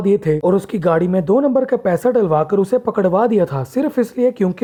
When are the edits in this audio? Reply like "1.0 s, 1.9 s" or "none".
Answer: none

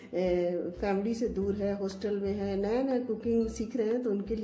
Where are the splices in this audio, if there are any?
none

